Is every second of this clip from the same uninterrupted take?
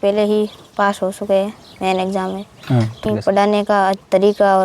no; 1 cut; at 3.0 s

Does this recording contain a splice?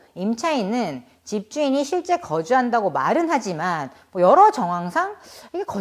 no; 0 cuts

